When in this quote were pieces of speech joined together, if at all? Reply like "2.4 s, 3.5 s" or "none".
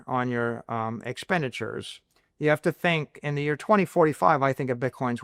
none